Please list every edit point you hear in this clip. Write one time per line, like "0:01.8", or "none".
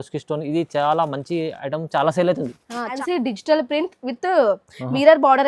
0:03.0